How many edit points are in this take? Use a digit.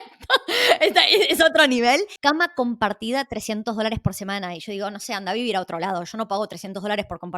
1